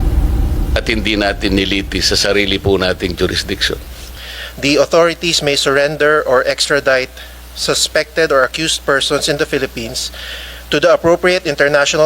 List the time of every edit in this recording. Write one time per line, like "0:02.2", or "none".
0:04.1